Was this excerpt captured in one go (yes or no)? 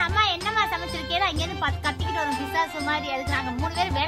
yes